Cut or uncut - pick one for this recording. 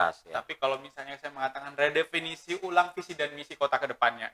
uncut